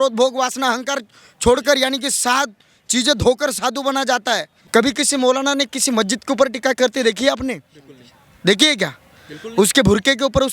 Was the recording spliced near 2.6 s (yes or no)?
no